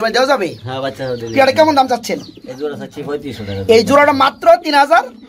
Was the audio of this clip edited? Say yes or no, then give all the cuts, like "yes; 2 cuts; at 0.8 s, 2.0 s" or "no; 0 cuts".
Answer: no; 0 cuts